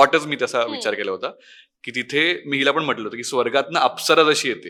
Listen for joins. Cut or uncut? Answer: uncut